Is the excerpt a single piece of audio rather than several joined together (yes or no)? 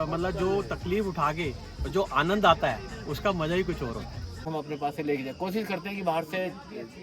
no